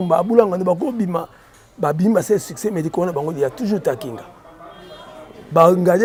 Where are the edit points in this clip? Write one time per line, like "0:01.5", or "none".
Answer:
none